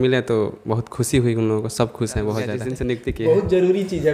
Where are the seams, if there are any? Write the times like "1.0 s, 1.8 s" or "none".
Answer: 2.7 s